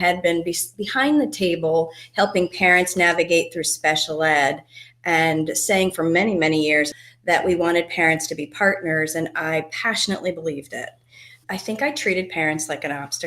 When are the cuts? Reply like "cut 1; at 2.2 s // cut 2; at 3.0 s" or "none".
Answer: cut 1; at 7.0 s // cut 2; at 11.3 s